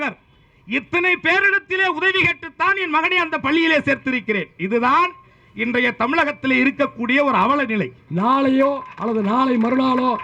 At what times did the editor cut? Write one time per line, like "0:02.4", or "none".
0:08.0